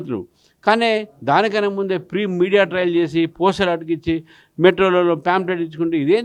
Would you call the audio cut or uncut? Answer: uncut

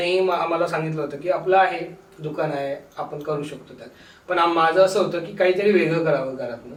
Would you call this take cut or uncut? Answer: uncut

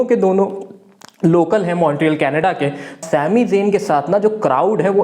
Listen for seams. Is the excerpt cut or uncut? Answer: cut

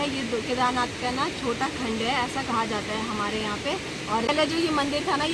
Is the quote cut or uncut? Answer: uncut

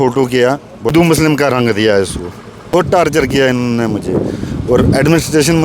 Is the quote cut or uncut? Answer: cut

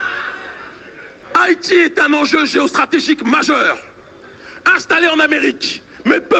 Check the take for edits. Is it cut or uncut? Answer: cut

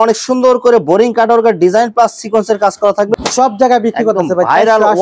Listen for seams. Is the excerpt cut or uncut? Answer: cut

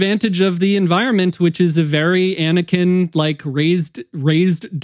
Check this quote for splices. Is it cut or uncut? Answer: uncut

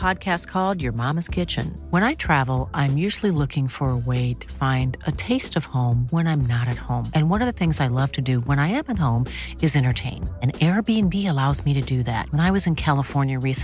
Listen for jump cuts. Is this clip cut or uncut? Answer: uncut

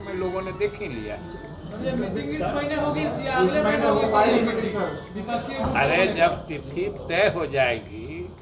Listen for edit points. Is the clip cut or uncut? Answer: uncut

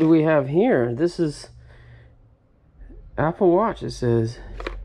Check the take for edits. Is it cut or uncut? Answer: uncut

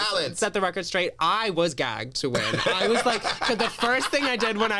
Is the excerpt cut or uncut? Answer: uncut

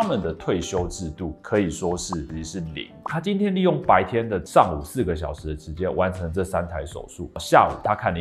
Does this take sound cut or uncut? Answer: cut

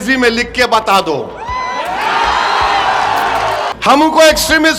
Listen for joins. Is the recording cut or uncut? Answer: cut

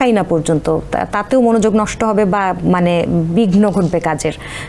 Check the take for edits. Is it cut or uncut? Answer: uncut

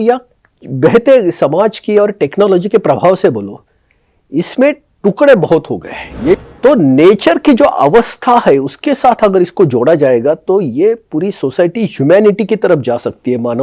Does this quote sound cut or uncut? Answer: cut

